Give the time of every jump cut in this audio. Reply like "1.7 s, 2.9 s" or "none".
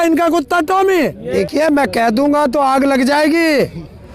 1.2 s